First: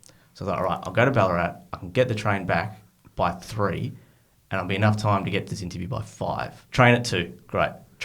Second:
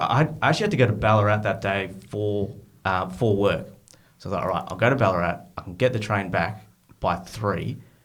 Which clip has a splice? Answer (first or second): first